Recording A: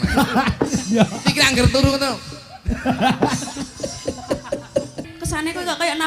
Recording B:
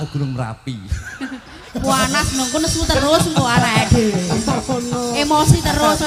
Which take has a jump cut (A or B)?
A